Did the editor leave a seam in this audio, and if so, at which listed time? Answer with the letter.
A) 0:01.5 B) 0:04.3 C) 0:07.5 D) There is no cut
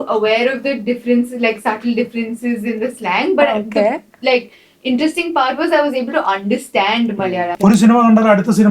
C